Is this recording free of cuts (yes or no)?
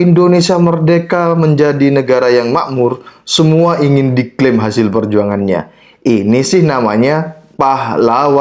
no